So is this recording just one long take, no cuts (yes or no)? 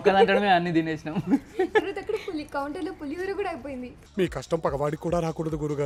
yes